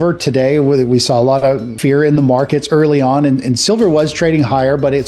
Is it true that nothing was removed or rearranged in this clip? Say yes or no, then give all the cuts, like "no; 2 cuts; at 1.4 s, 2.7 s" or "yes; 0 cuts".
no; 1 cut; at 1.7 s